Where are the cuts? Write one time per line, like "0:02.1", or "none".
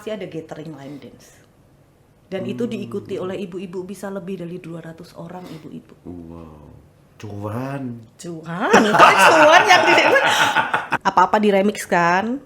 0:10.9